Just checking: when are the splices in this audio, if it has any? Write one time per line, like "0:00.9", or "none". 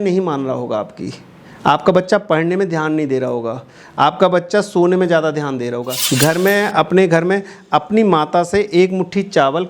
0:06.0